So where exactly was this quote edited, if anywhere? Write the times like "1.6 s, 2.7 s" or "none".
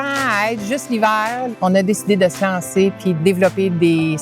1.5 s, 3.2 s